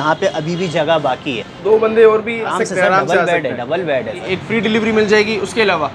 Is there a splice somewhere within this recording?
yes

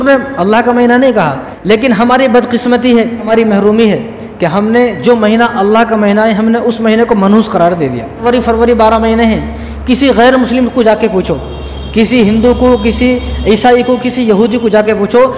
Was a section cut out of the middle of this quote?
yes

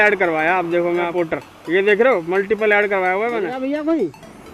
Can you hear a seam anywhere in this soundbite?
yes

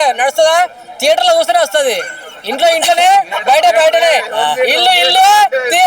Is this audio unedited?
yes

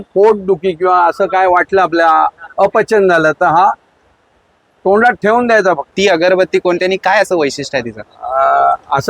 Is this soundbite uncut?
no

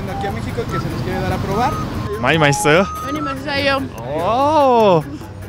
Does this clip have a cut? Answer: yes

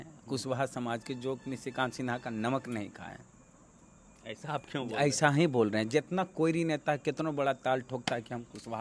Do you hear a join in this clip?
no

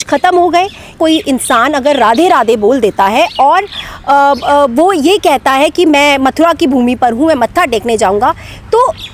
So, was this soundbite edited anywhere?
yes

